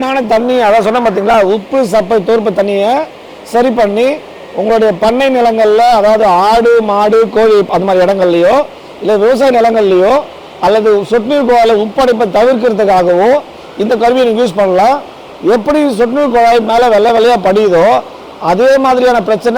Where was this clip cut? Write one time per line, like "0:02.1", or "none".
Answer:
none